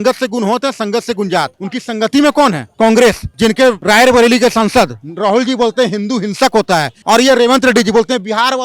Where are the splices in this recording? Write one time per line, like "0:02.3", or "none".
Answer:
0:06.9